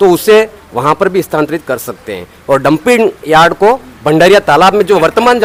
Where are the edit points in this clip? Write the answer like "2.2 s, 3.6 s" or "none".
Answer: none